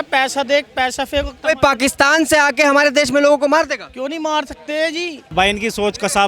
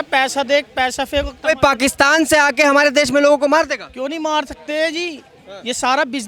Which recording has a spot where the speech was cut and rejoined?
first; 1 cut; at 5.2 s

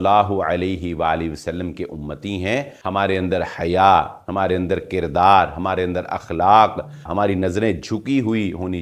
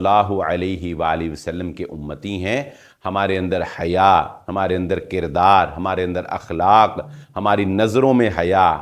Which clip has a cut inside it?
first; 2 cuts; at 2.7 s, 7.1 s

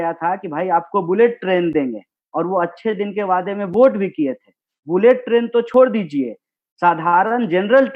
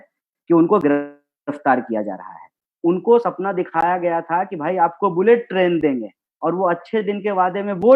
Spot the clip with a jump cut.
second; 1 cut; at 2.5 s

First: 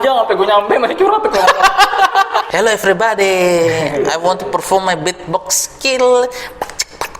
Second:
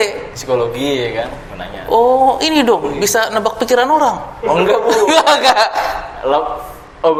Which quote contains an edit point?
first; 1 cut; at 2.5 s

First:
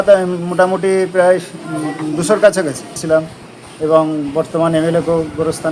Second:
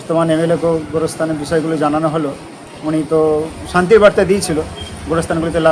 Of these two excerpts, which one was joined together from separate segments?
first; 1 cut; at 3.0 s

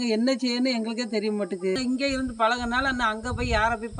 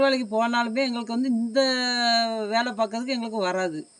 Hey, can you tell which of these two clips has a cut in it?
first; 1 cut; at 1.8 s

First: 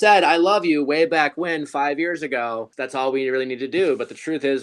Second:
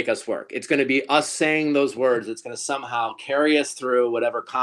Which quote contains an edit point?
first; 1 cut; at 2.7 s

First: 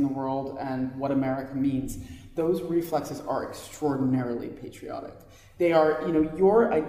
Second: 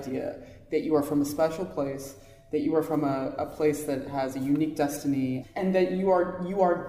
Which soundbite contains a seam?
second; 1 cut; at 5.5 s

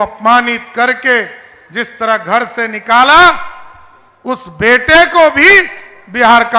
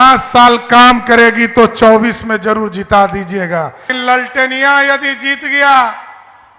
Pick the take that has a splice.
second; 1 cut; at 3.9 s

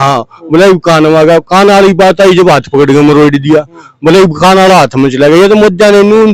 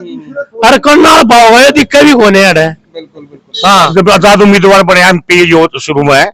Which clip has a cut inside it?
second; 1 cut; at 3.9 s

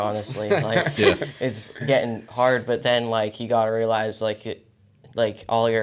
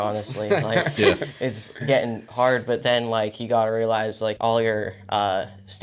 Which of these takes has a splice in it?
second; 1 cut; at 4.4 s

